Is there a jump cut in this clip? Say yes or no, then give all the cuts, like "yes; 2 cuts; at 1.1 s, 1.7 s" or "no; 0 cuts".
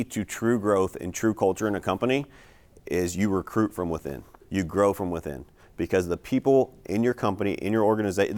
no; 0 cuts